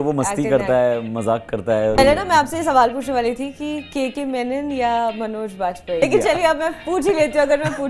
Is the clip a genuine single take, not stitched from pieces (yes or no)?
no